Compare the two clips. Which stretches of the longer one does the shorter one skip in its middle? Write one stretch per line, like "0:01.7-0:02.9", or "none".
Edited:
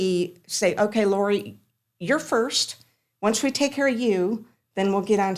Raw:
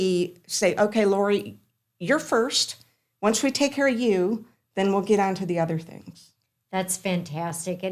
none